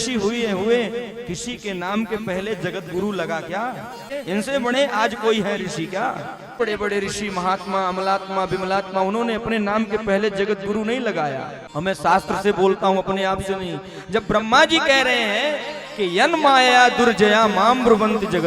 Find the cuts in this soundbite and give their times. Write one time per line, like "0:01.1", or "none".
0:04.1
0:06.6
0:11.6